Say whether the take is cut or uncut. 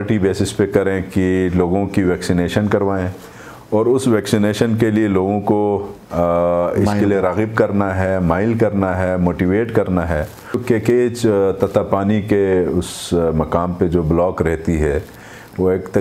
cut